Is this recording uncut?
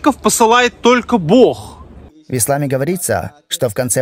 yes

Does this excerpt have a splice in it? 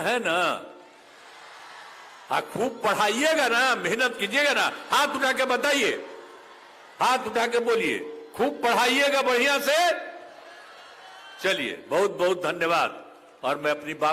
no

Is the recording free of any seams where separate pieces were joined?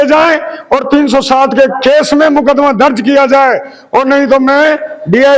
yes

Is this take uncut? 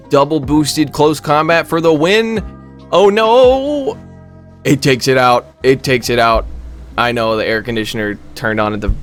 yes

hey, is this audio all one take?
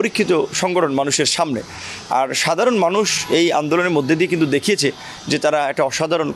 yes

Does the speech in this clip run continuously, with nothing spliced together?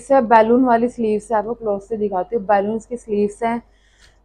yes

